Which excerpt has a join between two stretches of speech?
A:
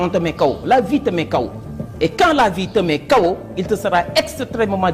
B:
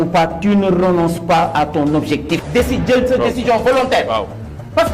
B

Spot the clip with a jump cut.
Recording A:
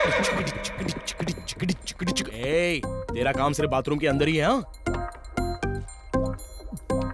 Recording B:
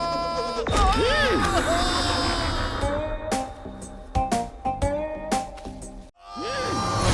B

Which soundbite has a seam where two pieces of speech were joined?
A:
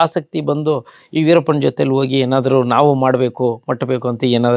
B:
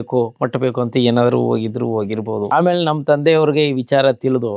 B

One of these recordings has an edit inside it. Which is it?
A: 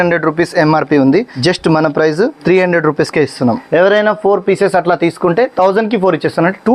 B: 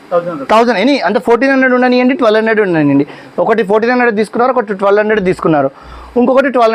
A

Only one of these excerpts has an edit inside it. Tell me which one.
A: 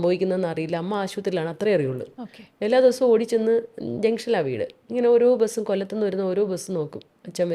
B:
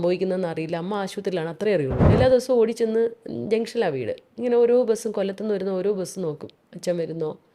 B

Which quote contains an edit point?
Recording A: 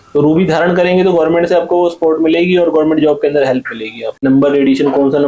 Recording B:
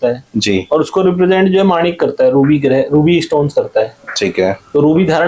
A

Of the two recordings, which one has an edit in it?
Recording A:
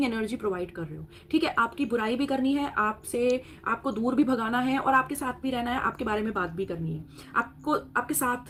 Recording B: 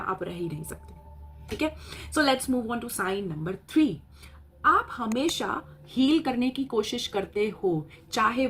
B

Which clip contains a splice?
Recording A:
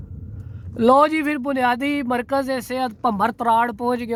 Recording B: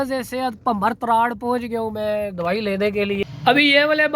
B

